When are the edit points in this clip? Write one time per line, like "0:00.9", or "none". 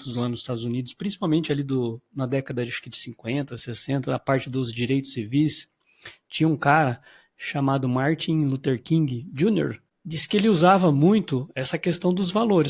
0:09.9